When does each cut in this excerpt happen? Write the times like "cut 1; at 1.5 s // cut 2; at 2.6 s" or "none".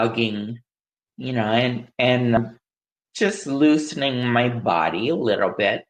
cut 1; at 2.4 s